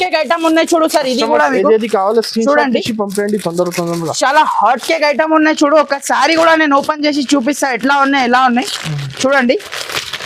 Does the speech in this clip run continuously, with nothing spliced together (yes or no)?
yes